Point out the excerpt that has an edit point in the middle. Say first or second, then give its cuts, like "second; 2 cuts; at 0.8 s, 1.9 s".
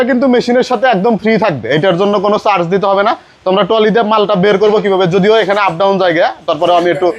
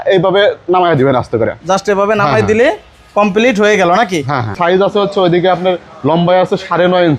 second; 1 cut; at 4.5 s